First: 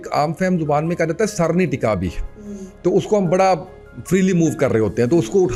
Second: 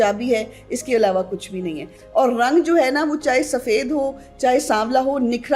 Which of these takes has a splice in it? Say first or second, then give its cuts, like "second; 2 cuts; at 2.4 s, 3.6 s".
second; 1 cut; at 1.9 s